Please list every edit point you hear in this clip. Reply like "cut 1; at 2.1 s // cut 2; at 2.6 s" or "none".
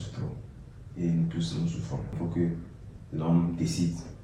cut 1; at 2.1 s